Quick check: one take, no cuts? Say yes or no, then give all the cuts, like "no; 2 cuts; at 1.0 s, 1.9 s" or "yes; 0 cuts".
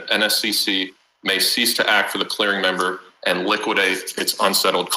yes; 0 cuts